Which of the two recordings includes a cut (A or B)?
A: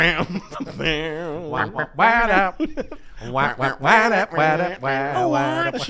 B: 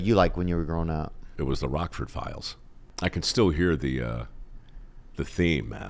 B